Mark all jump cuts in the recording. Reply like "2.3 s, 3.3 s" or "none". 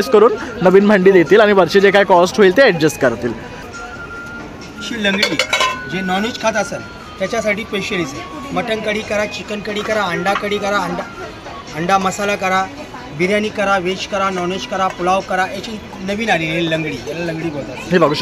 3.6 s